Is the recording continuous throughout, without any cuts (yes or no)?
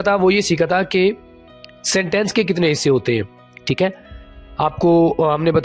yes